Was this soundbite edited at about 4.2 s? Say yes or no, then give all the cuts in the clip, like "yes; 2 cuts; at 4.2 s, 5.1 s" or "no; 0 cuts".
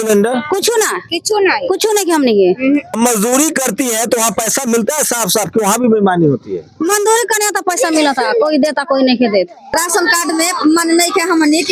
no; 2 cuts; at 2.9 s, 9.8 s